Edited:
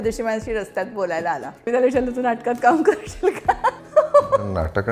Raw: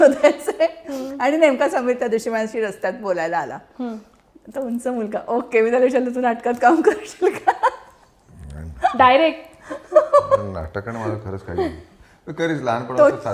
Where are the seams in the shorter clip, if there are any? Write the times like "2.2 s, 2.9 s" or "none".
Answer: 1.7 s, 3.8 s

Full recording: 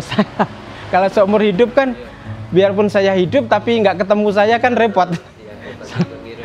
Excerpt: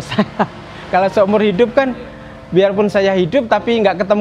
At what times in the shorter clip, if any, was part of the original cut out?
none

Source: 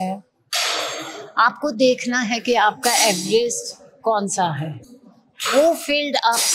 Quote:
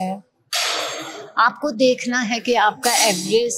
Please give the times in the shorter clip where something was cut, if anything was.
none

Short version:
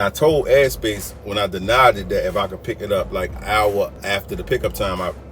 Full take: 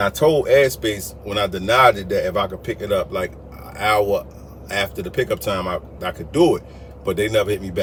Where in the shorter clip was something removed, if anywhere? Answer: 3.4 s, 4.0 s

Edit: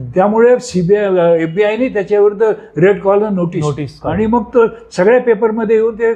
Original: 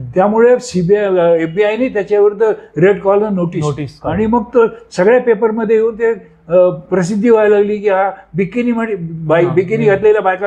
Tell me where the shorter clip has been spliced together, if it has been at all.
none

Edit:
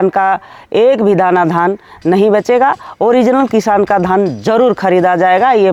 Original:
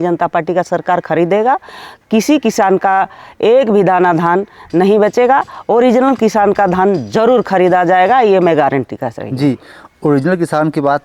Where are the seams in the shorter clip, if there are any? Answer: none

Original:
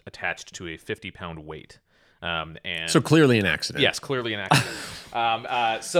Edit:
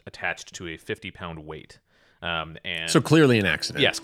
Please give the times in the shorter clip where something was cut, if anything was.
none

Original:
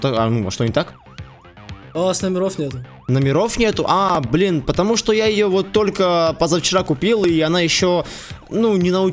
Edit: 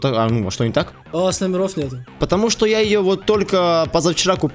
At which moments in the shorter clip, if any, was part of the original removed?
1.0 s, 2.2 s

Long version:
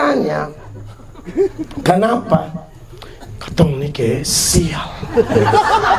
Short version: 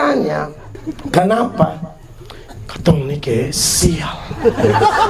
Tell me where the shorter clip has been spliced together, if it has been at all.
0.9 s

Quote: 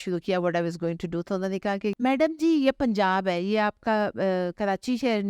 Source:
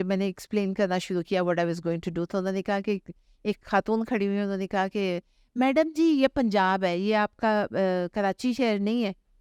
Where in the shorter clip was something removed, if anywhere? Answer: 2.0 s

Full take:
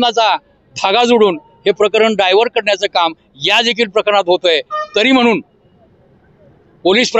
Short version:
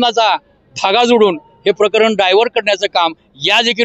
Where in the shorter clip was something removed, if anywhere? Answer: none

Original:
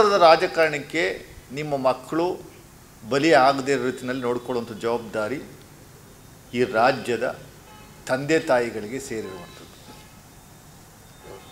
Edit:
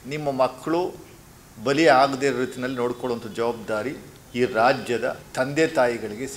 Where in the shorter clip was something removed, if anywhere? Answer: 4.1 s, 5.2 s

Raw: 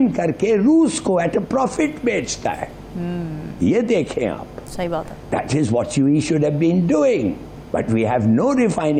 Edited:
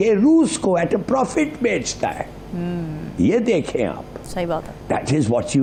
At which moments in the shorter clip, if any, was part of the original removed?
none

